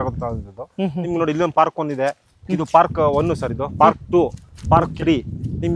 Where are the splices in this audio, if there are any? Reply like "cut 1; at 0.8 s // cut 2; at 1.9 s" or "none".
none